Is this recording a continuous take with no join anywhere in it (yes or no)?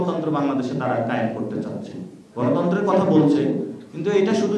yes